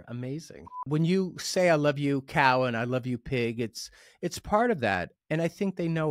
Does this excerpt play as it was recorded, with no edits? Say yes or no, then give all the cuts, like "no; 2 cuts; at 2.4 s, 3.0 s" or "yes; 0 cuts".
no; 2 cuts; at 0.9 s, 5.1 s